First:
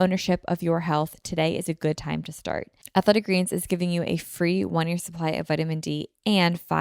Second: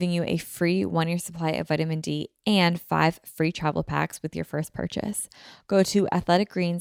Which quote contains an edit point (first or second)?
first